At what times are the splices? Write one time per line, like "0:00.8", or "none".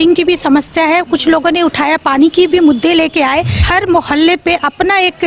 0:03.6